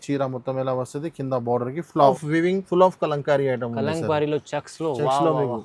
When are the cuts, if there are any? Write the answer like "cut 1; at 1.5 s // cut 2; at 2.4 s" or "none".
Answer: cut 1; at 2.1 s

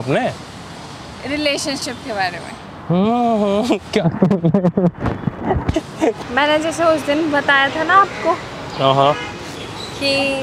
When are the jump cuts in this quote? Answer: cut 1; at 6.2 s

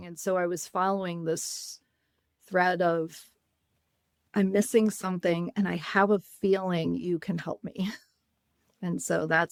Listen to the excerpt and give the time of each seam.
none

